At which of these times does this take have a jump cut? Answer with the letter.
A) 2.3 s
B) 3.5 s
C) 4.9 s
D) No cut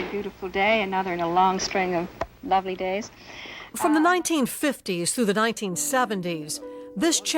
D